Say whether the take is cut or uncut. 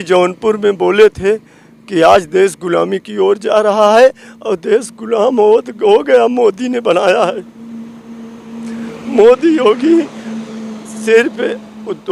uncut